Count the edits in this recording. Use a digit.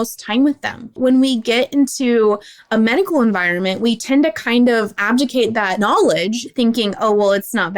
2